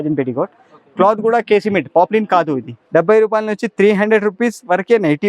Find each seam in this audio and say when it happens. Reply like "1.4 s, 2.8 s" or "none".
2.7 s